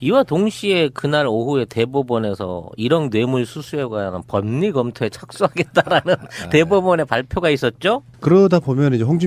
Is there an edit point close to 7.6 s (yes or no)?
yes